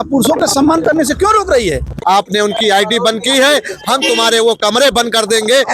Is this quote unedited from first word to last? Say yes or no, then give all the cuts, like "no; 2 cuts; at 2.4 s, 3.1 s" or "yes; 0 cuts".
no; 1 cut; at 1.9 s